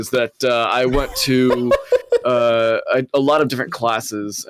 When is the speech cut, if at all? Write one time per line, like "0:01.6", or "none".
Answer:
none